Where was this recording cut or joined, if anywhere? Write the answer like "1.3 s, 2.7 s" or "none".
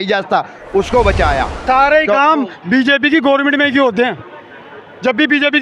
1.6 s